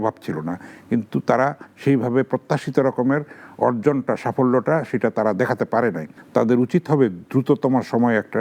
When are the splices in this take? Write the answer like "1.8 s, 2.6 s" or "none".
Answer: 6.1 s